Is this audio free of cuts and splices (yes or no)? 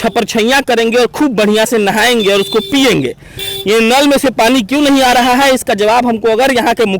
yes